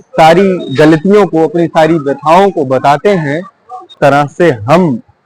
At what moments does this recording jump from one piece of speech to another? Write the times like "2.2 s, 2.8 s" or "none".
3.9 s